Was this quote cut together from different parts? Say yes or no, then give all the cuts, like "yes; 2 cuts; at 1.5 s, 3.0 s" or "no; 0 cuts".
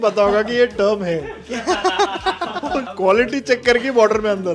yes; 1 cut; at 2.9 s